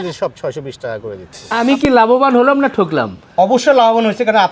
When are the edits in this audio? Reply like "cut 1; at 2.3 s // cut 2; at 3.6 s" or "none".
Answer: cut 1; at 1.5 s